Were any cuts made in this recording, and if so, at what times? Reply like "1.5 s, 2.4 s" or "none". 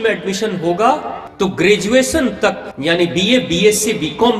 1.2 s, 2.7 s